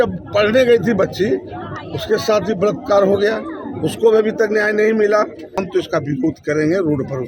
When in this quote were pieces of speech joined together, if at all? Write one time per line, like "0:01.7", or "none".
0:05.6